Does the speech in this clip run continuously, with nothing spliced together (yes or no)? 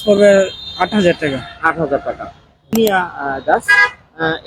no